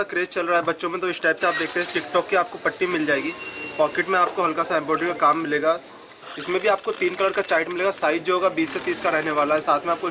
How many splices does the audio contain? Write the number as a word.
zero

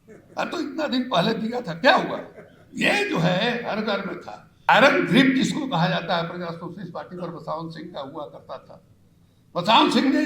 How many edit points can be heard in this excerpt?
one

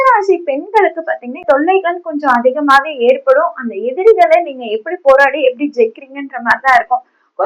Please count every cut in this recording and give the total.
one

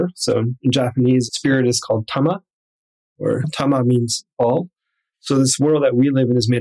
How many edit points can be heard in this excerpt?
zero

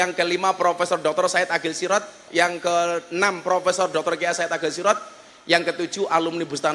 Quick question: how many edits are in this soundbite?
one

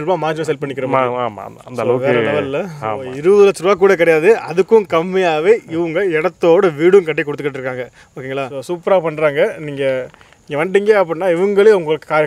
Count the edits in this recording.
two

